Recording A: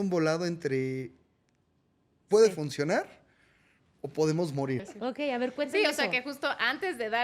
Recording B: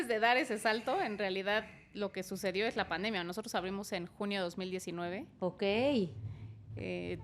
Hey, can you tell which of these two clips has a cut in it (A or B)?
A